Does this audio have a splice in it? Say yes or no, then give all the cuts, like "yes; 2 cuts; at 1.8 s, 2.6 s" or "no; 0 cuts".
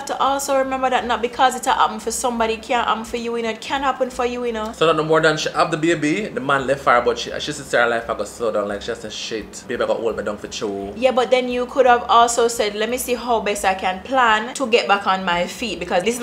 no; 0 cuts